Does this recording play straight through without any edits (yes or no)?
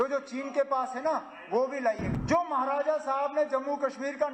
no